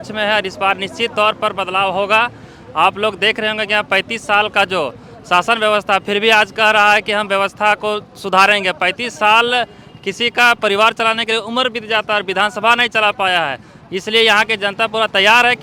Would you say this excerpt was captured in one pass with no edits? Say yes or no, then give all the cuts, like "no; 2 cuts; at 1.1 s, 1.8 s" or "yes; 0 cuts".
yes; 0 cuts